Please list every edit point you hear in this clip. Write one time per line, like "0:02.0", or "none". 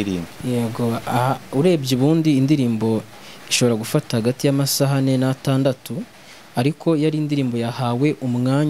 none

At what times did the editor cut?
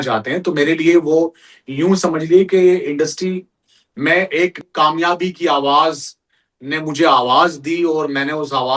0:04.6

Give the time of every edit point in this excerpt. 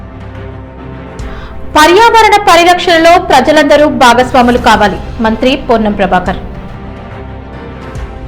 0:01.2

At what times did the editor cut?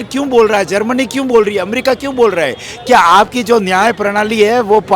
none

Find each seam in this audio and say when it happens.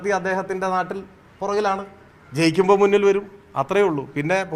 none

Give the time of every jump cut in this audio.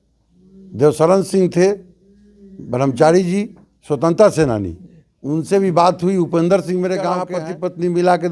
0:07.4

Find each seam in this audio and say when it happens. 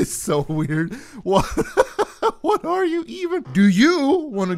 0:03.4

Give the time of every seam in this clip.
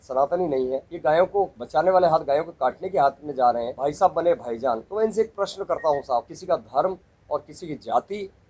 0:00.9
0:01.6
0:03.7
0:04.9
0:06.3

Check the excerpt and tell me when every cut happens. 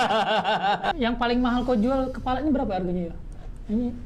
0:00.9

